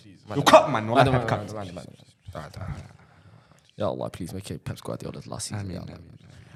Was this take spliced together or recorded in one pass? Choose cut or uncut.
uncut